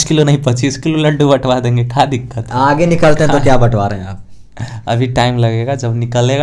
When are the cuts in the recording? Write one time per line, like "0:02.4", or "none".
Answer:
none

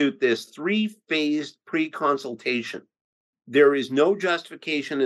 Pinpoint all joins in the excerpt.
none

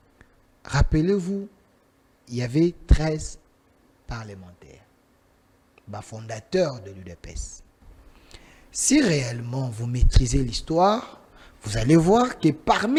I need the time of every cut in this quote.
none

